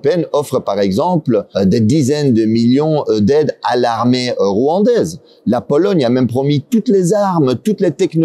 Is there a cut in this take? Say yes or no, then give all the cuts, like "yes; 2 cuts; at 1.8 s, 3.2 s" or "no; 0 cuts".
yes; 1 cut; at 1.5 s